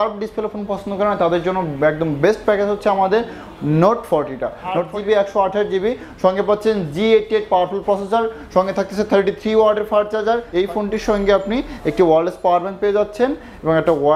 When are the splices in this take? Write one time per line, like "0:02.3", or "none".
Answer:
0:04.9
0:10.5